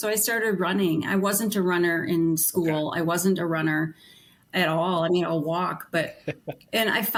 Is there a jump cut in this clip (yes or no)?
no